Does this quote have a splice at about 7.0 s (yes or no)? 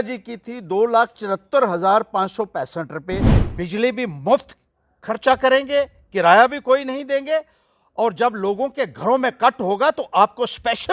no